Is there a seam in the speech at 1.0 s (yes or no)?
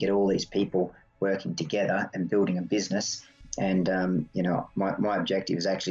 no